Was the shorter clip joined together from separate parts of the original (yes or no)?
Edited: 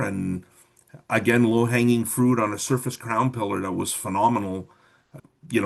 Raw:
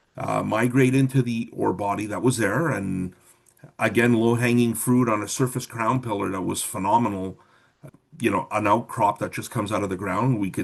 no